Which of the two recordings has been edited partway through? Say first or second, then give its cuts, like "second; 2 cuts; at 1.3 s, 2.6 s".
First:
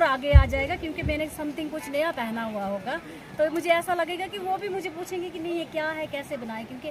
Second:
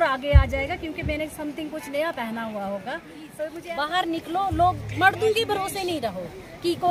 second; 1 cut; at 3.6 s